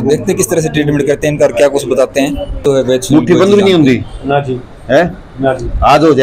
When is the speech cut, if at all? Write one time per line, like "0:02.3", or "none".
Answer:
0:02.6